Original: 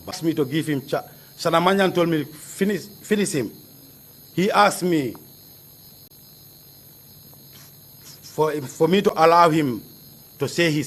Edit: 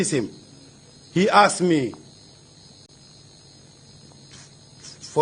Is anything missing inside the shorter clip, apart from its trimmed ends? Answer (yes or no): no